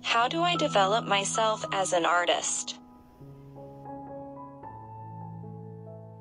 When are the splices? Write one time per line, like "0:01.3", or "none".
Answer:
none

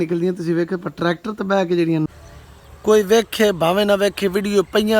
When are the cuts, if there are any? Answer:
0:02.1

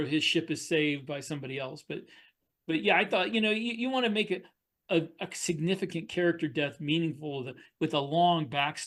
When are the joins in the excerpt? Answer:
none

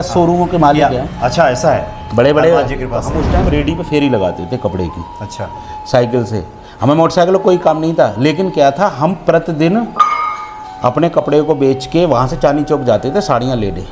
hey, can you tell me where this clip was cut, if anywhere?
0:03.1

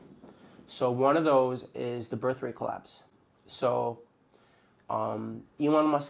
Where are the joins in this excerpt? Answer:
none

